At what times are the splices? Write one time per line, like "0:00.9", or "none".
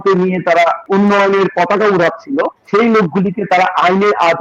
0:00.8
0:02.6